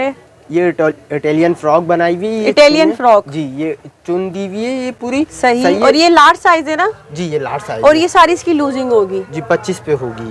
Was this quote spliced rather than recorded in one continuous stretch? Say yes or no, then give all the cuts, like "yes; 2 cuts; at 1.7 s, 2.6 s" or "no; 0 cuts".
no; 0 cuts